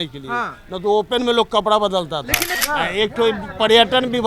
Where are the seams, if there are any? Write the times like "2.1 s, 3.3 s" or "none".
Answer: 2.6 s

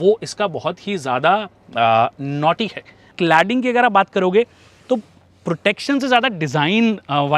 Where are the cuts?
3.1 s

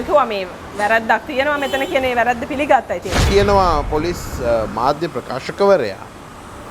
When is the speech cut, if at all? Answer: 3.2 s

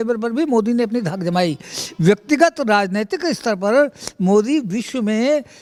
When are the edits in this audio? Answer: none

